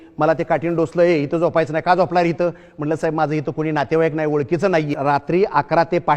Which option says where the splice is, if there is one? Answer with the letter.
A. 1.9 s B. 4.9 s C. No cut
B